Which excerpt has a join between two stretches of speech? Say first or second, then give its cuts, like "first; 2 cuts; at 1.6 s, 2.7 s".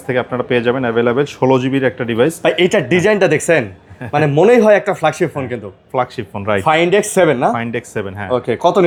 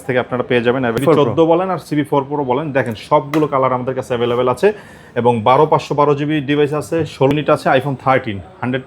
second; 2 cuts; at 1.0 s, 7.3 s